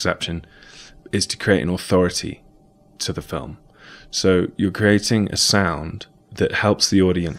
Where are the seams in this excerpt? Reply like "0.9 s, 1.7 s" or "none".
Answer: none